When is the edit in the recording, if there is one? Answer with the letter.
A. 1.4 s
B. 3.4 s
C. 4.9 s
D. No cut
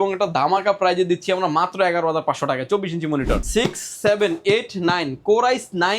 B